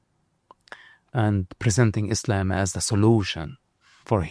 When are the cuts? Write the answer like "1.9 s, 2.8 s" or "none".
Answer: none